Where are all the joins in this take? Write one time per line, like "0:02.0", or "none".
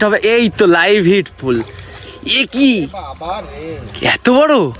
none